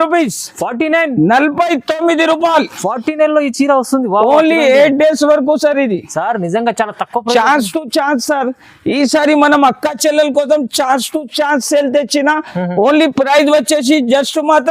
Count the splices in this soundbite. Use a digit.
0